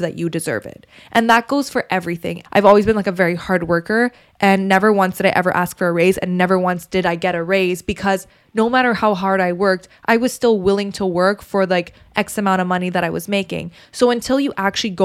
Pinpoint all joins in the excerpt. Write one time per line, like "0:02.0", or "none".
0:02.3